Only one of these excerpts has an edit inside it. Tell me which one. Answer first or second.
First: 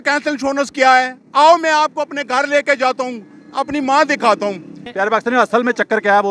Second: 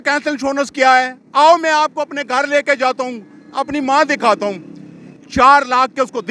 first